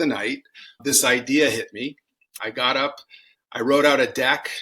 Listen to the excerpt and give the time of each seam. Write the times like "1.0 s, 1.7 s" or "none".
2.3 s